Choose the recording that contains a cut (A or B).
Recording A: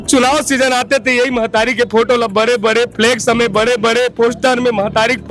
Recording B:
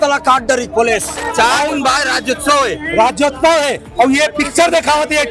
B